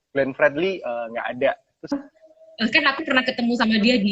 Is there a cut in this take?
yes; 1 cut; at 1.9 s

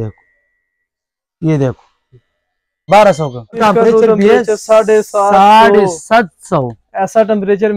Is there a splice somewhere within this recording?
yes; 2 cuts; at 2.8 s, 3.6 s

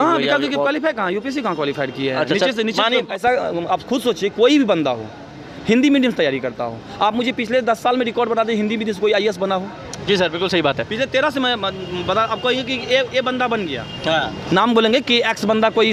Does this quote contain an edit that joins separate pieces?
no; 0 cuts

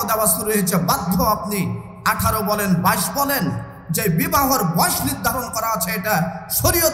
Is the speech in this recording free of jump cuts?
yes; 0 cuts

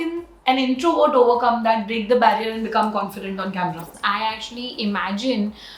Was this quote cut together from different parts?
yes; 1 cut; at 4.0 s

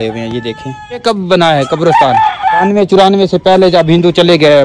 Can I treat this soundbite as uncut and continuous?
no; 2 cuts; at 1.0 s, 2.6 s

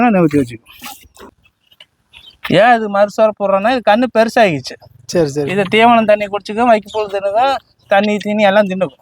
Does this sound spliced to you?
yes; 1 cut; at 1.3 s

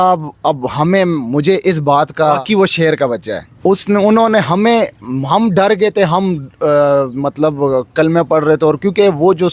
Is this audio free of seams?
no; 2 cuts; at 2.4 s, 3.5 s

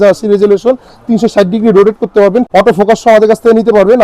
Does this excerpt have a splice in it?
yes; 1 cut; at 2.5 s

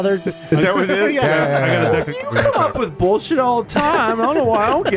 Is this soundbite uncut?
no; 1 cut; at 2.3 s

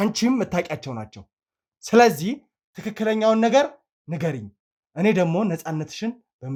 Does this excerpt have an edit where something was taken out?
no; 0 cuts

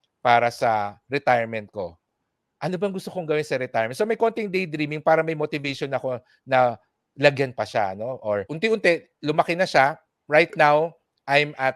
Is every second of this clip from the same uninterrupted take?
no; 1 cut; at 8.5 s

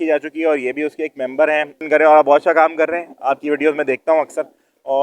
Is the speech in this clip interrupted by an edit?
yes; 1 cut; at 1.8 s

